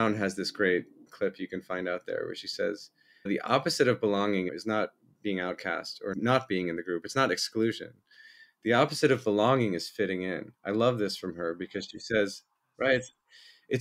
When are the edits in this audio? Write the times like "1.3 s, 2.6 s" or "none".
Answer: 1.1 s, 3.3 s, 4.5 s, 6.1 s